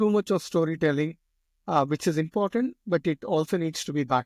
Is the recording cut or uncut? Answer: uncut